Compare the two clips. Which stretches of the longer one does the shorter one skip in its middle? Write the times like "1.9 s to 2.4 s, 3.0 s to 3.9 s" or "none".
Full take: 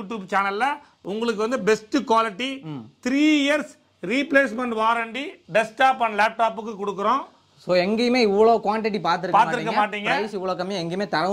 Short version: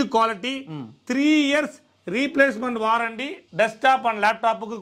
none